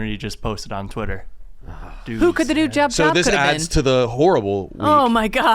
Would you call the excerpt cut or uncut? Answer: cut